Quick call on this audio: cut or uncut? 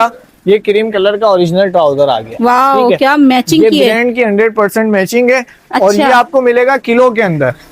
uncut